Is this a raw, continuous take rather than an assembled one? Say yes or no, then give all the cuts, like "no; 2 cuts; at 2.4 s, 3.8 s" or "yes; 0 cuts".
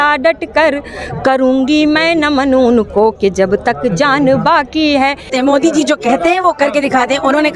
no; 1 cut; at 5.3 s